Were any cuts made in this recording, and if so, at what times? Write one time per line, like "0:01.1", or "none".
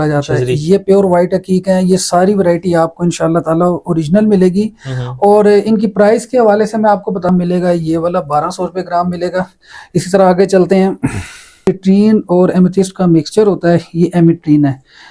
0:07.3
0:11.7

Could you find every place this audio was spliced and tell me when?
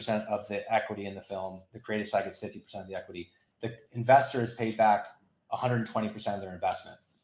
none

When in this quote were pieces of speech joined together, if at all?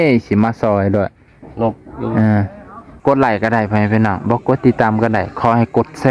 0:02.9

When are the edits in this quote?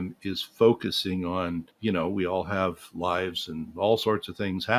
0:01.7

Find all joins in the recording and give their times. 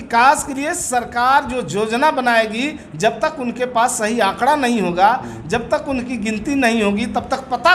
none

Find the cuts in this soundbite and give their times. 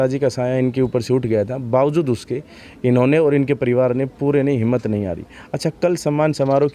none

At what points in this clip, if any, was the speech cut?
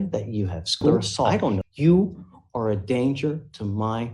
0:01.6

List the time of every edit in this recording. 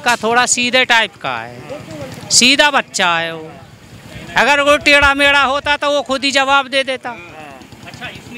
none

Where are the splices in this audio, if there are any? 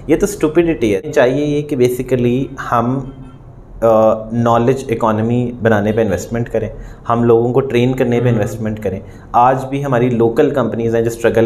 0:01.0

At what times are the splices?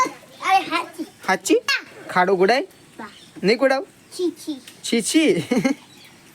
0:01.8

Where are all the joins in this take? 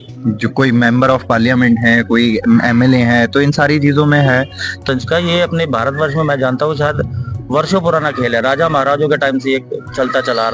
0:04.8

